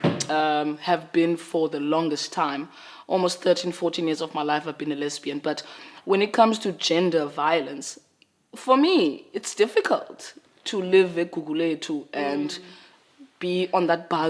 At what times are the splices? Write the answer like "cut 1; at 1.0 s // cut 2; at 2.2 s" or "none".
cut 1; at 3.1 s